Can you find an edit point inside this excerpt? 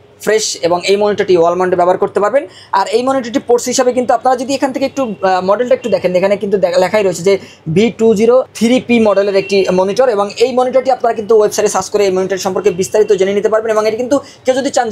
no; 0 cuts

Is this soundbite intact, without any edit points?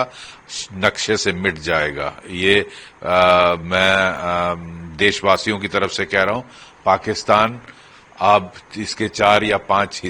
yes; 0 cuts

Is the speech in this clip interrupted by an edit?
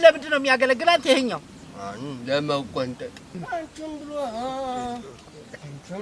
yes; 1 cut; at 3.2 s

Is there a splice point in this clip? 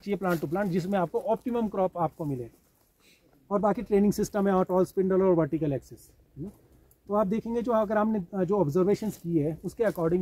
no; 0 cuts

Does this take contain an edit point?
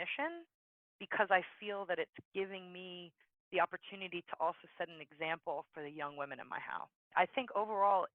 yes; 1 cut; at 6.9 s

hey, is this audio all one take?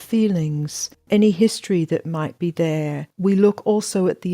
no; 2 cuts; at 1.0 s, 3.0 s

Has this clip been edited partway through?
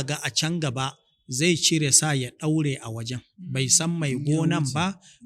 no; 0 cuts

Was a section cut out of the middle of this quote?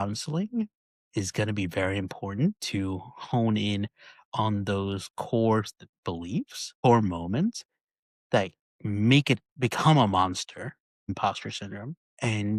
no; 0 cuts

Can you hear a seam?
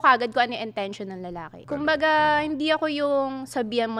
yes; 1 cut; at 1.5 s

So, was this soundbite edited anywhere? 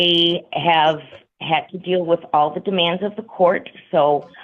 no; 0 cuts

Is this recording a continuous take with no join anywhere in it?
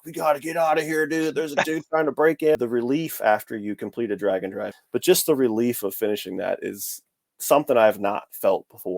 no; 2 cuts; at 2.6 s, 4.7 s

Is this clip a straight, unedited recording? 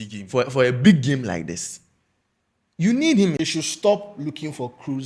no; 1 cut; at 3.4 s

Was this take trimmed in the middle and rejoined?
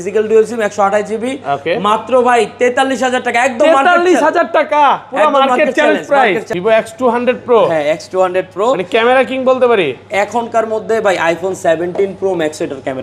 yes; 1 cut; at 6.5 s

